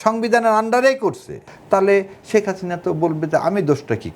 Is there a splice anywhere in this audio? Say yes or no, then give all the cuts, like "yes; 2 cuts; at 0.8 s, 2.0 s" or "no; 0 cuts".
yes; 1 cut; at 1.5 s